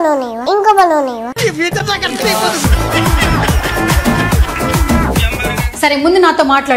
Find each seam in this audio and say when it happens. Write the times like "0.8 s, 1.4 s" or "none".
5.7 s